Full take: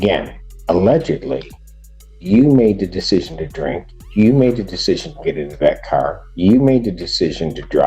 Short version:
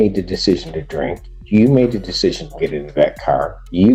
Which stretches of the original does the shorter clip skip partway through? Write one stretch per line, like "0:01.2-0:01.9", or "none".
none